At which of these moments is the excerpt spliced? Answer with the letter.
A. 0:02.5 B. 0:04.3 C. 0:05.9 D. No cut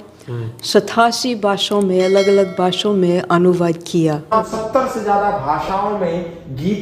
B